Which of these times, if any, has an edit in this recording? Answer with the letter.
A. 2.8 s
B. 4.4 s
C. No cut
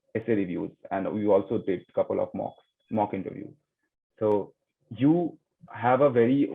C